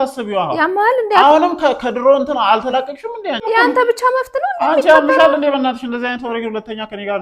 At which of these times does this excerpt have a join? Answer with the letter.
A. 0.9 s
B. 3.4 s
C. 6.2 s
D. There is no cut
B